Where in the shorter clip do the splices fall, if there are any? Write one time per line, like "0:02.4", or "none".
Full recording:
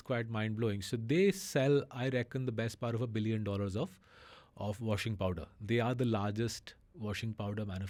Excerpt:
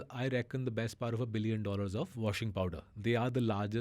0:02.1